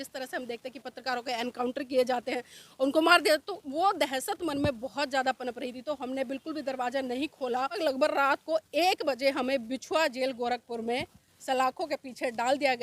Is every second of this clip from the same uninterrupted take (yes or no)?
no